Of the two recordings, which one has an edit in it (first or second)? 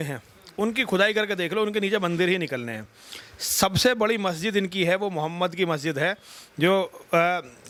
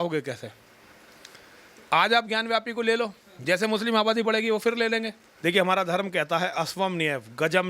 second